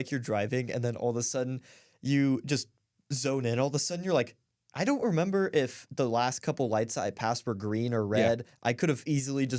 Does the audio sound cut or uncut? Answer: uncut